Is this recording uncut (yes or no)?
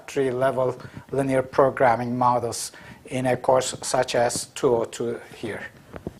no